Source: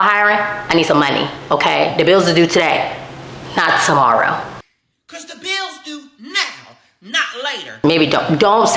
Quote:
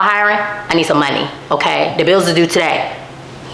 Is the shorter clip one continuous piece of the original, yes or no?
yes